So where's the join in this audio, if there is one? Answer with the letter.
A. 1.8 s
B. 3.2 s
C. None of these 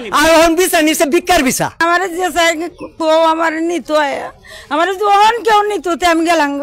A